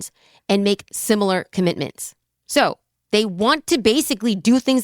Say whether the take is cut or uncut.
uncut